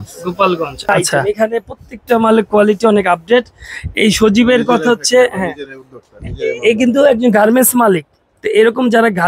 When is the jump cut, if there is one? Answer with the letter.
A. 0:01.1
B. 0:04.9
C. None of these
A